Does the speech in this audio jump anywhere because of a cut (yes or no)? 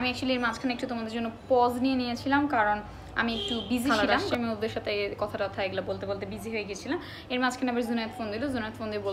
yes